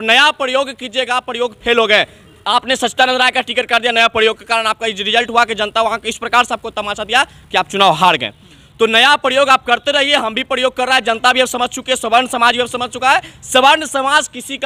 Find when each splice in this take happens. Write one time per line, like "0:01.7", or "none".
none